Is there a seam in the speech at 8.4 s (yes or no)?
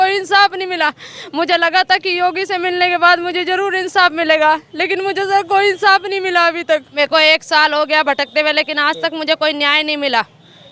no